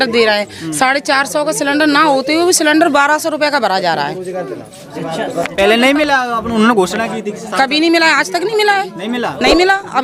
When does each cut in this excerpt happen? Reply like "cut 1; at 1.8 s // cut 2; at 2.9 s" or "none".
none